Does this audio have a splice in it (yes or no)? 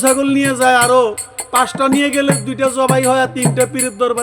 no